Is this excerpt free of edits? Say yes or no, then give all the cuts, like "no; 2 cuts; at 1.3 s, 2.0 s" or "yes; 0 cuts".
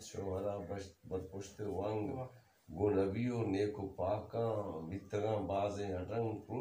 yes; 0 cuts